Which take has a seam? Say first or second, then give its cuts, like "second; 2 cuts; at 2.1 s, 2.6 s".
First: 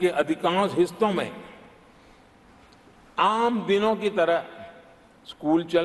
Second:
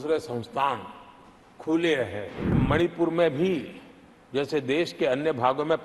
second; 1 cut; at 2.6 s